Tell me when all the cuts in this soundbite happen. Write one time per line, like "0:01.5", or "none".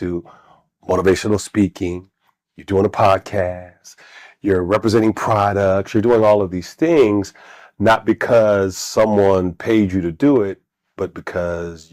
none